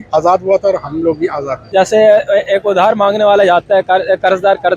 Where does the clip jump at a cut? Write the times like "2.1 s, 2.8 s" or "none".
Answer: 1.6 s